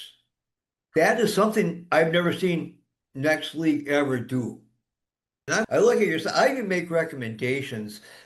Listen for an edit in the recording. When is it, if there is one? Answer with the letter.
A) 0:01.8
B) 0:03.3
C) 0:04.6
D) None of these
D